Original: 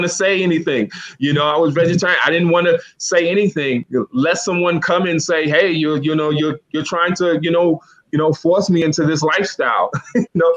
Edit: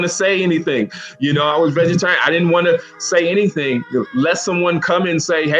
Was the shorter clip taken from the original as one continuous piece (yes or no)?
yes